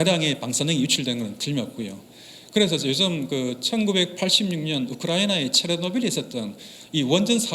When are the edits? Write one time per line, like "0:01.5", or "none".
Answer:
none